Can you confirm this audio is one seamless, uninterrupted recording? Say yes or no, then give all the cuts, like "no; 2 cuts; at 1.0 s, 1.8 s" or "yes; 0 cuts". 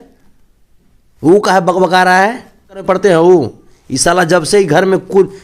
no; 1 cut; at 2.8 s